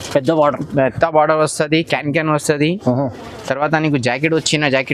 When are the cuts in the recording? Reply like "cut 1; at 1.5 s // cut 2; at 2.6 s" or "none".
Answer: none